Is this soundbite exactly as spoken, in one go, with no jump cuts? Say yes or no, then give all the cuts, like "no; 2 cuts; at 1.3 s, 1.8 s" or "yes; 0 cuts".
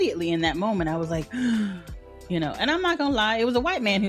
yes; 0 cuts